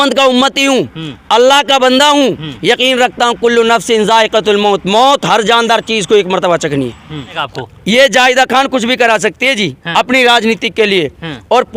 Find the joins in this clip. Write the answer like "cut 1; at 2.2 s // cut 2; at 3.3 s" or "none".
cut 1; at 7.5 s